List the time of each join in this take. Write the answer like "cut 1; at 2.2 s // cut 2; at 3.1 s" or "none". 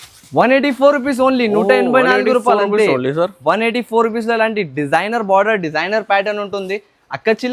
none